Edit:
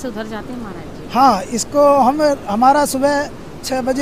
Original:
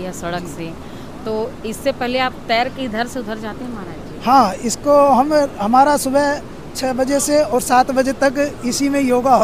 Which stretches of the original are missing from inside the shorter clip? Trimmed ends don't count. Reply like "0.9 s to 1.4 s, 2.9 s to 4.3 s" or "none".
none